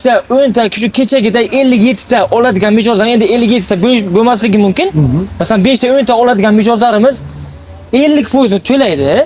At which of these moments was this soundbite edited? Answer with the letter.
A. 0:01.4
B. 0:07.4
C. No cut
C